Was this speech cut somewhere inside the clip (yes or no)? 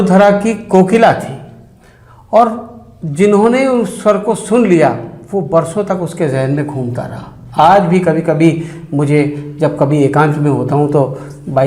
no